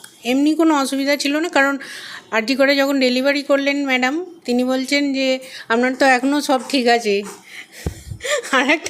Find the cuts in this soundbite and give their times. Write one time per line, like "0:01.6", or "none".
none